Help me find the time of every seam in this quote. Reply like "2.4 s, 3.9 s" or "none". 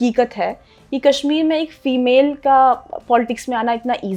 none